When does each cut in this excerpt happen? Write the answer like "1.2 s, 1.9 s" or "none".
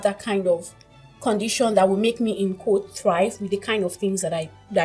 none